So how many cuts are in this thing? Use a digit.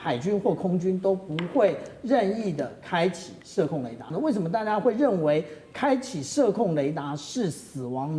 1